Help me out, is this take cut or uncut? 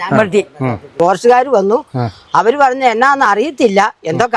cut